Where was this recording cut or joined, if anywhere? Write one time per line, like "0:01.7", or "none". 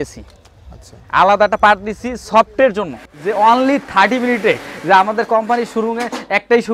0:03.1